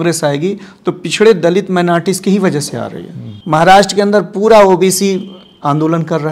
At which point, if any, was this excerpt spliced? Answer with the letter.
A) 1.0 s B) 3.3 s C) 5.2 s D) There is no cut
B